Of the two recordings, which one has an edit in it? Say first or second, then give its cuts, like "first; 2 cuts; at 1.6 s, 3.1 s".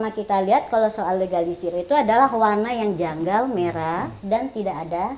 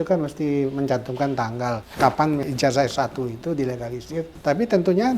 second; 3 cuts; at 1.8 s, 2.4 s, 4.3 s